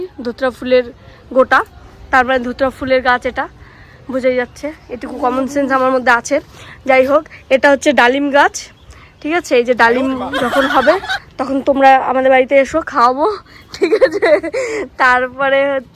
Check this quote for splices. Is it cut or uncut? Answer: uncut